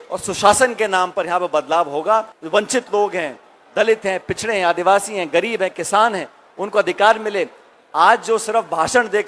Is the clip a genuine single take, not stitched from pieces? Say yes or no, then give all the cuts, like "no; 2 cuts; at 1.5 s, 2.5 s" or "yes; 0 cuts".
no; 1 cut; at 2.4 s